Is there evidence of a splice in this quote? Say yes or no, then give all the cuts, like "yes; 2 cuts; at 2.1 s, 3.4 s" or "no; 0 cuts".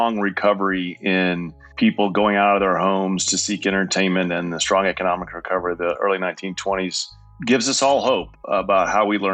yes; 2 cuts; at 7.3 s, 8.3 s